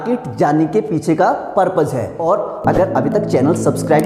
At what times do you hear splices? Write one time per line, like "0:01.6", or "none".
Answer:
0:02.1